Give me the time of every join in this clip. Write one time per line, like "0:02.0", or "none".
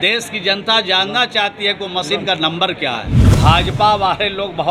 0:03.2